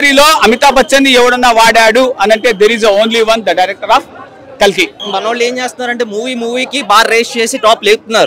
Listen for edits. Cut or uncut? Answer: cut